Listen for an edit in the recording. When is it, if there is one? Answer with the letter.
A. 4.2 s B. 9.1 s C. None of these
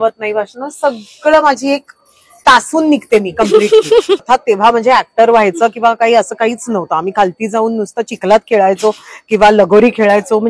A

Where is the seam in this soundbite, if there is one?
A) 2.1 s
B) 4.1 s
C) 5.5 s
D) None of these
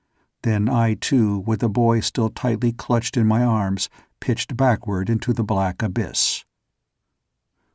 B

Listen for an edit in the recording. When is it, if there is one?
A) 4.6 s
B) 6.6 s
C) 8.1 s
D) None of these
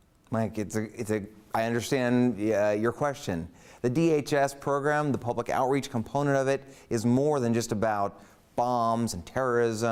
D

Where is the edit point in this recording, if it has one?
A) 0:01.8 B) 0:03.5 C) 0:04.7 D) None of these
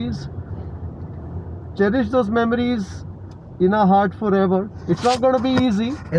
C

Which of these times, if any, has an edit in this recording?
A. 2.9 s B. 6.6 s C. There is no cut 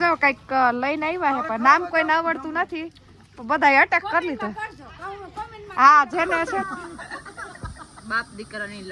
B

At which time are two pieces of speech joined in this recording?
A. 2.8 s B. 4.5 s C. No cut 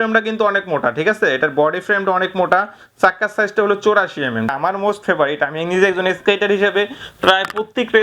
B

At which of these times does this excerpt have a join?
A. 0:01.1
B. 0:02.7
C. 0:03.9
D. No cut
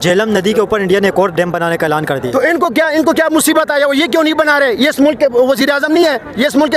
D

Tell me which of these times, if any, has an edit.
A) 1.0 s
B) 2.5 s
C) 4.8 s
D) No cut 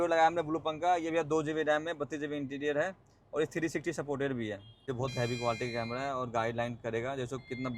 C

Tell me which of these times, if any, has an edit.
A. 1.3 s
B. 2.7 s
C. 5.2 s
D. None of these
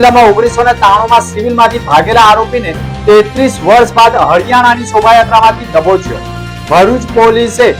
D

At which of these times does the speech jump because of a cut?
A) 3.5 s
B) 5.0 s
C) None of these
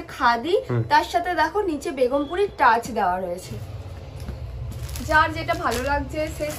A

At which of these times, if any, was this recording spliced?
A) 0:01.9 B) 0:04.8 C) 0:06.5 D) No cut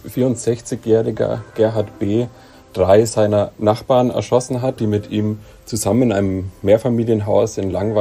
B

